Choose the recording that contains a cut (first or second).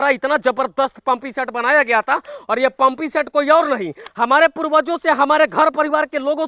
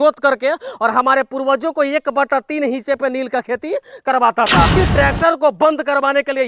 second